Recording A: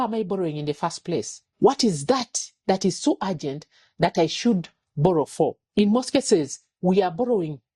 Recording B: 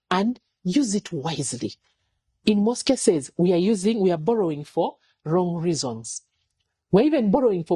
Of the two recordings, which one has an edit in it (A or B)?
A